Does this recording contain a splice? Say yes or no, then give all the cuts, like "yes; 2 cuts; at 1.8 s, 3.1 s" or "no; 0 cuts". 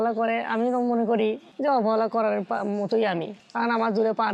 no; 0 cuts